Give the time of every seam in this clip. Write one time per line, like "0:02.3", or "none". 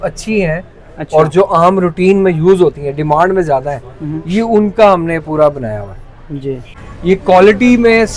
0:06.7